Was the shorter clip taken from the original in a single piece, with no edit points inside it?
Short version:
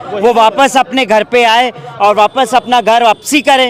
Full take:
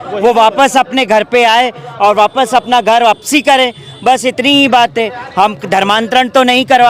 yes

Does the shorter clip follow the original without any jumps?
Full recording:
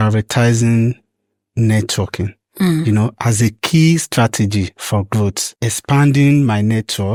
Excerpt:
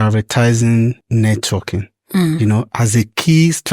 no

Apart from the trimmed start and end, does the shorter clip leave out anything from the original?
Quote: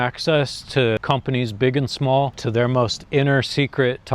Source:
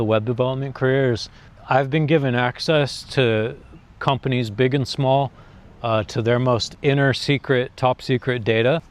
yes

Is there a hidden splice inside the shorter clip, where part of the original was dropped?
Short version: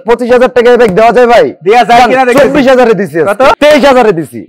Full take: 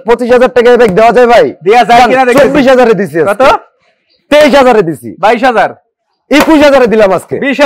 yes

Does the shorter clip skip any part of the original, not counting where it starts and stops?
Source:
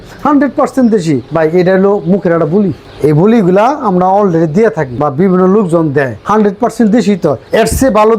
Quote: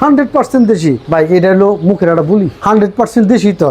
yes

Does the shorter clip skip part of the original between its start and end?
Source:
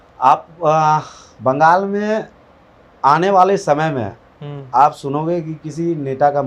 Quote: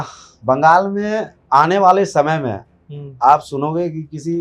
yes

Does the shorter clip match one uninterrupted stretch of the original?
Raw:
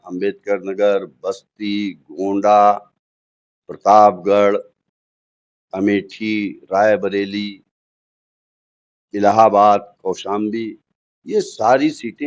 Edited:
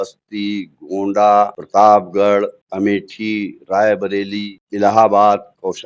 no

